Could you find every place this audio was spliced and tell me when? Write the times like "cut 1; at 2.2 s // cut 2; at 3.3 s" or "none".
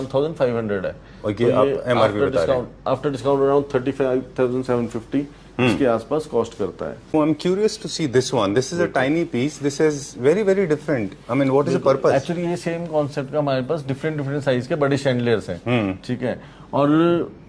cut 1; at 7.1 s